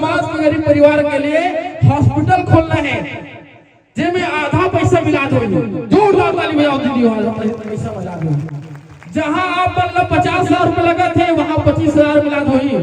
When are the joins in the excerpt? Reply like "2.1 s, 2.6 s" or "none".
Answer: none

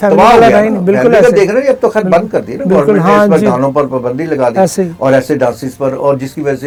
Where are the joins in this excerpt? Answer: none

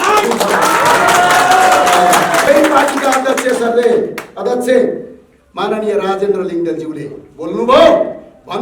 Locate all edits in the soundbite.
2.5 s

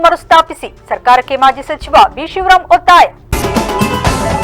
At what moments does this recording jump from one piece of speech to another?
3.3 s

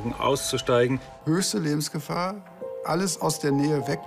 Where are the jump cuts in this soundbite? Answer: 1.2 s

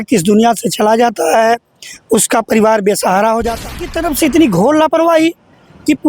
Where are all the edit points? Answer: 3.7 s

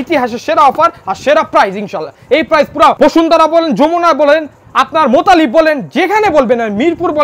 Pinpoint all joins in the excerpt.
3.0 s

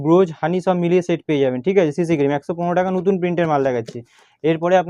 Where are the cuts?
none

